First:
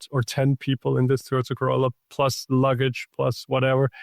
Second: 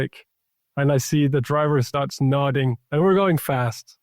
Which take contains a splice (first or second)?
second